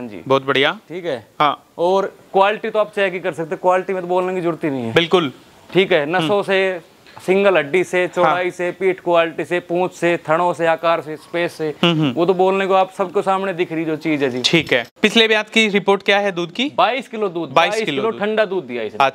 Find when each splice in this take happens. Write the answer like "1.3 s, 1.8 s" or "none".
11.7 s, 14.9 s

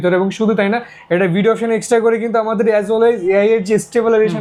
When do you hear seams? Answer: none

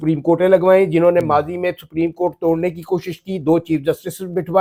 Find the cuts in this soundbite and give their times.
none

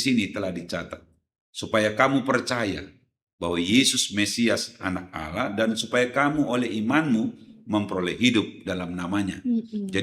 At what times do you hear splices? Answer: none

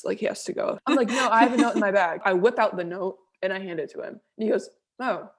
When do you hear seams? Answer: 1.0 s, 2.2 s

